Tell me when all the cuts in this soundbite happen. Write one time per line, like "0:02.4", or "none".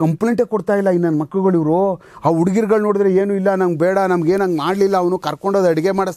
none